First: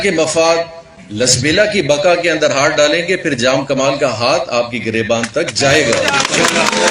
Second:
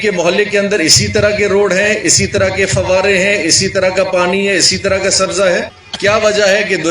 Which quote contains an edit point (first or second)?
second